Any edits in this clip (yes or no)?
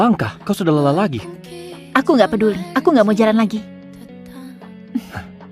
no